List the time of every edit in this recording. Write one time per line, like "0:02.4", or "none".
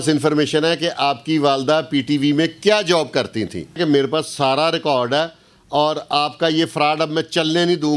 0:03.8